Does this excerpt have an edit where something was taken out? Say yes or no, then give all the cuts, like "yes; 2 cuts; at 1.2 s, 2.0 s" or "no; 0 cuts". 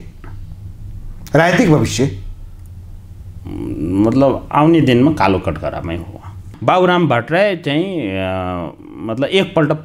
yes; 1 cut; at 6.5 s